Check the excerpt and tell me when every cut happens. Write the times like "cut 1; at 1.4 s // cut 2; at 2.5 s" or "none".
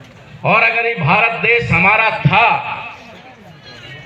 none